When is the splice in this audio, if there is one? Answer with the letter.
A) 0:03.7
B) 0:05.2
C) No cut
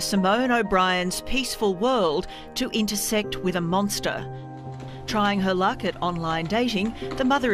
B